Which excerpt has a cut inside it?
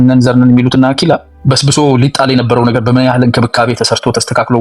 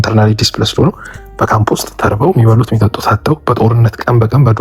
first; 1 cut; at 1.3 s

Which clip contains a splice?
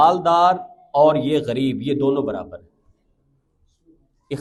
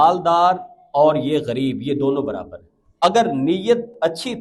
second; 1 cut; at 2.8 s

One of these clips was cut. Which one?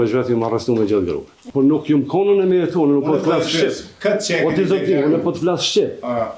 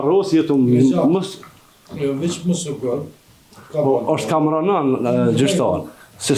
first; 1 cut; at 1.3 s

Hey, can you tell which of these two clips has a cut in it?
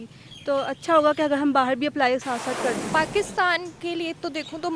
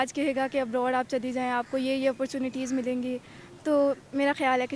first; 1 cut; at 2.8 s

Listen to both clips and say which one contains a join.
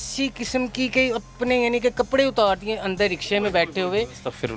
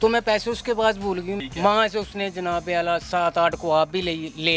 second; 1 cut; at 1.3 s

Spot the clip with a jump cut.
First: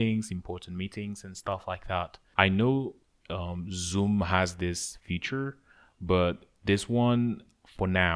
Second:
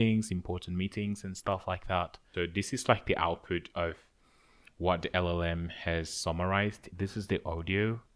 second; 2 cuts; at 2.2 s, 6.9 s

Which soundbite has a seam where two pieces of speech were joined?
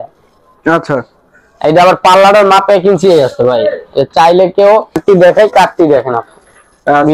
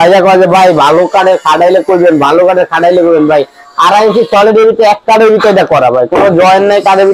first; 1 cut; at 5.0 s

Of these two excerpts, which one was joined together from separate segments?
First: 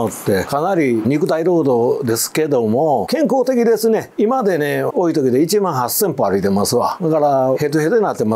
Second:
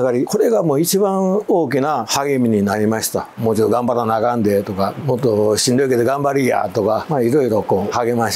second; 1 cut; at 3.3 s

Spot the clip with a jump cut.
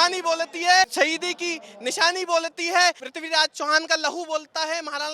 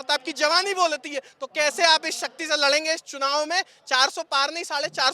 first; 2 cuts; at 0.9 s, 3.1 s

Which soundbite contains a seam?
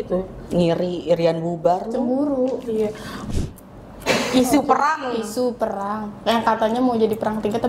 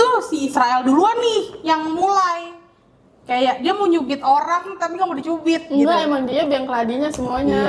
first; 1 cut; at 3.2 s

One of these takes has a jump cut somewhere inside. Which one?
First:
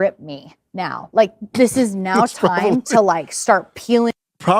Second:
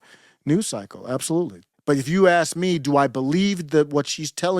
second; 1 cut; at 1.7 s

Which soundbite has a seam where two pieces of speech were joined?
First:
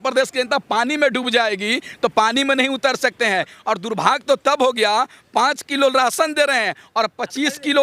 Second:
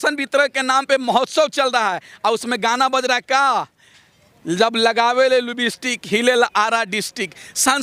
first; 1 cut; at 3.5 s

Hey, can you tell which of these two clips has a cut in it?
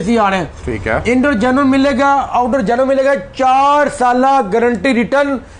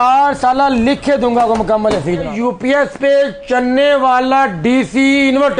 second; 1 cut; at 2.3 s

